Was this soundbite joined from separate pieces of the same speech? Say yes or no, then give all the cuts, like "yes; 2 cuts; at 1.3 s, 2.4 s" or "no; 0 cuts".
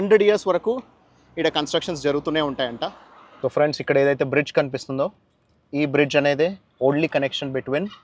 yes; 1 cut; at 3.3 s